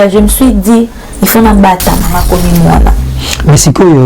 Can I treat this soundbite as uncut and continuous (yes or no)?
no